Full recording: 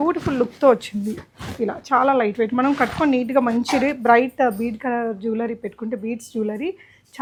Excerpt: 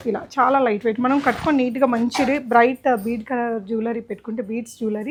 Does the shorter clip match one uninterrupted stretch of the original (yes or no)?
yes